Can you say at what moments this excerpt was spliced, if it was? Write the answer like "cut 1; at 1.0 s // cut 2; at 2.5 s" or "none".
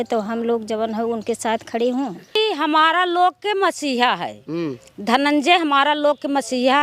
cut 1; at 2.4 s